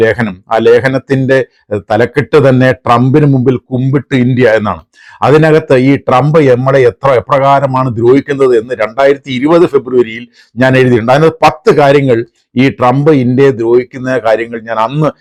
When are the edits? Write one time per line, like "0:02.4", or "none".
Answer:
none